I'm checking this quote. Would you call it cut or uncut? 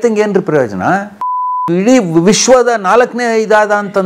uncut